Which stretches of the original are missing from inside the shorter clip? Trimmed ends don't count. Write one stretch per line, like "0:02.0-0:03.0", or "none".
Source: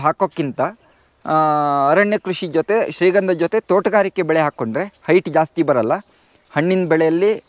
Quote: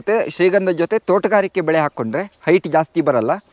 none